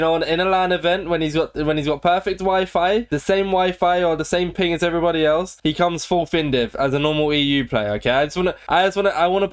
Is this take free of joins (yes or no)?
yes